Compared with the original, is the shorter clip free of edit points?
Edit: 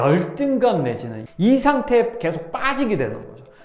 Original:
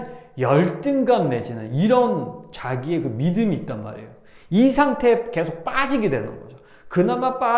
no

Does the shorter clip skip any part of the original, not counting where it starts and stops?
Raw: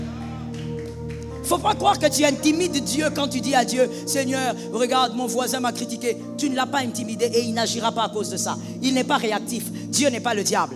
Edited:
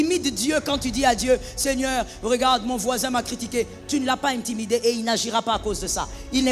no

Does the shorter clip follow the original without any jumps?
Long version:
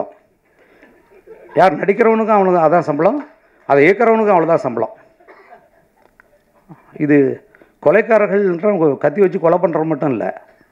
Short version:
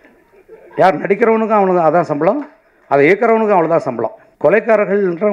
no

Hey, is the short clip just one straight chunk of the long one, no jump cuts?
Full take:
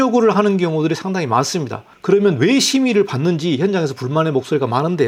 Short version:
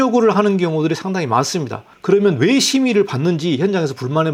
yes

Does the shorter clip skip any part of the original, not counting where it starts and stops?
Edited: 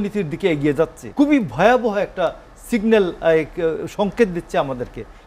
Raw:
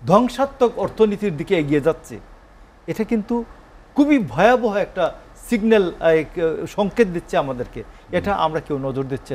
yes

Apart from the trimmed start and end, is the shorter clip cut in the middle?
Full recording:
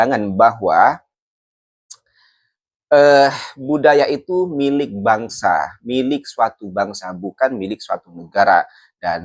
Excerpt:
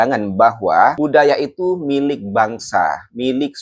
yes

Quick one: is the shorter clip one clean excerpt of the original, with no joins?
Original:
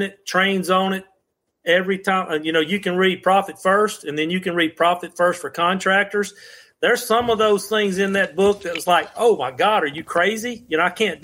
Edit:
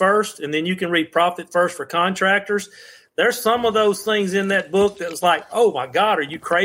yes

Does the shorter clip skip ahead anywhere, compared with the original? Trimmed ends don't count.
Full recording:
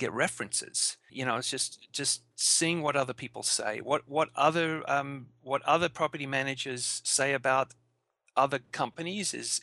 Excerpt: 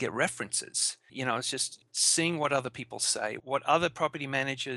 yes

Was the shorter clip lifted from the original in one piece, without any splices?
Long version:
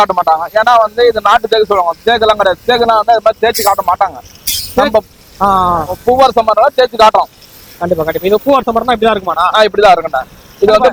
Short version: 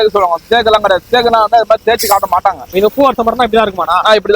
no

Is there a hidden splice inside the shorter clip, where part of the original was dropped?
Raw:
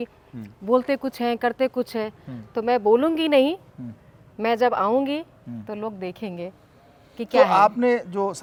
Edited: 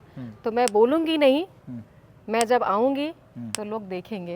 no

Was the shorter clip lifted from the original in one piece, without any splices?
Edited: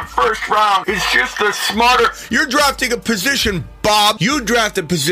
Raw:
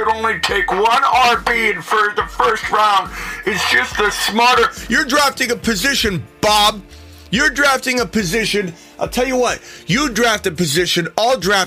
no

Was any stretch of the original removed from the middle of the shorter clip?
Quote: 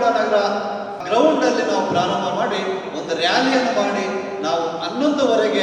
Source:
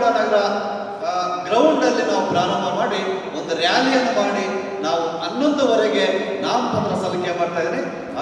yes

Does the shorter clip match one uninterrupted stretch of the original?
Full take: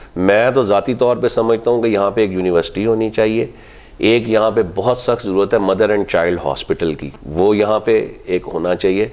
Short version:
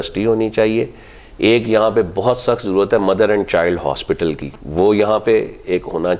yes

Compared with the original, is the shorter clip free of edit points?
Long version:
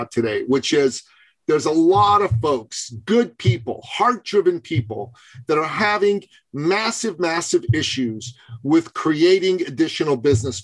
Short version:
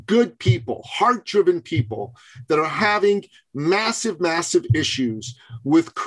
yes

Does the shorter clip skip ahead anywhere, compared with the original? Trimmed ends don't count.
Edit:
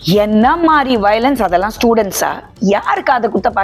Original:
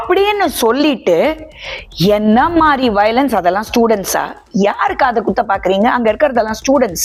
no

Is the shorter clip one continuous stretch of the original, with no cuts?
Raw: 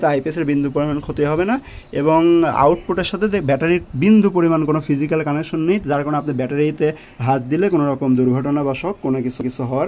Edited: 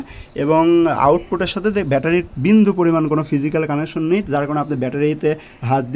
yes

